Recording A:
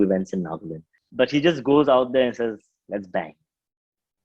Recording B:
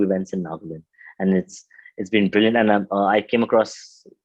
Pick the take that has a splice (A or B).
A